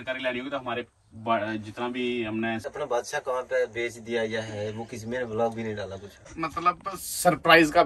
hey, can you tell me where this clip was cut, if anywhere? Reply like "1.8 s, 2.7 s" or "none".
2.7 s, 6.3 s